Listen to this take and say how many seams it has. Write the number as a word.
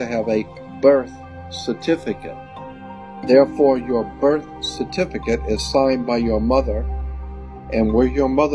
one